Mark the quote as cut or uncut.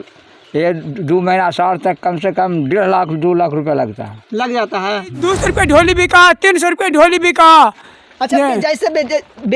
cut